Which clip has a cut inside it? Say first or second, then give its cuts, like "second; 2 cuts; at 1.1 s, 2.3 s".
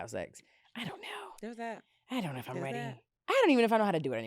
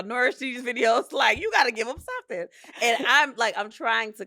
first; 1 cut; at 3.1 s